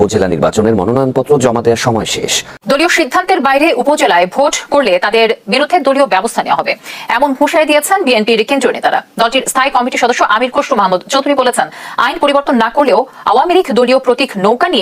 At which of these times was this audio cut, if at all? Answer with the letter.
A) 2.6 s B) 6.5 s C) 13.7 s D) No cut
A